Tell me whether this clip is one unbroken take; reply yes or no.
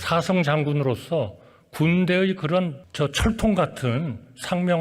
no